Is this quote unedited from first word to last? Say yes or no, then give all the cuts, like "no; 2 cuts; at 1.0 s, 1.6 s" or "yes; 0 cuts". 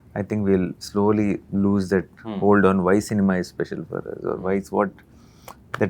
yes; 0 cuts